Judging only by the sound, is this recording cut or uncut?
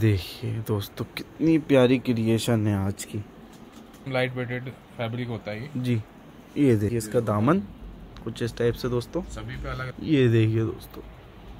cut